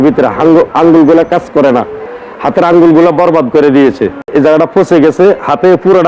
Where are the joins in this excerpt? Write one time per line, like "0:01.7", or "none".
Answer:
0:04.3